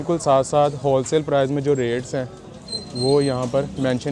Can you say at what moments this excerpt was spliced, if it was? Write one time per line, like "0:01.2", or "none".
none